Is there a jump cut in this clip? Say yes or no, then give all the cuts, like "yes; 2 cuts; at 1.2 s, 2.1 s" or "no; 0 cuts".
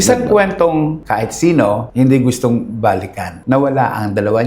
yes; 1 cut; at 3.4 s